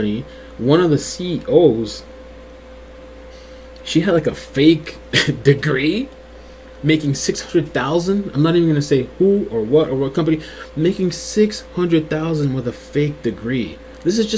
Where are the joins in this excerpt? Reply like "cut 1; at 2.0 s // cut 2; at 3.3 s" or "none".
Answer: none